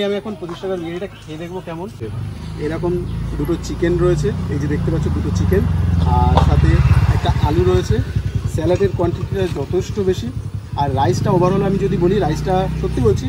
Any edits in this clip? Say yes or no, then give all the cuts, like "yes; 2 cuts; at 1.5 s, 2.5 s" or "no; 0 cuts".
yes; 1 cut; at 2.1 s